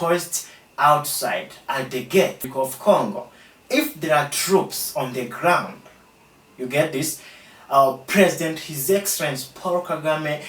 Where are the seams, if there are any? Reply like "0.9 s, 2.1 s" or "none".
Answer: 2.4 s